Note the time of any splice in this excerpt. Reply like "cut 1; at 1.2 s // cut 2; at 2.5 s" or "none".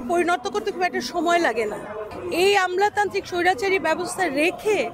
cut 1; at 2.1 s